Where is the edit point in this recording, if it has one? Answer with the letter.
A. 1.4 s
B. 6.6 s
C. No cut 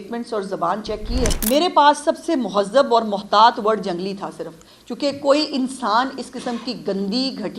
A